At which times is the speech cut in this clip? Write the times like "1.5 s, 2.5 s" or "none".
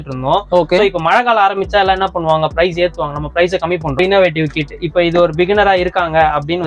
4.0 s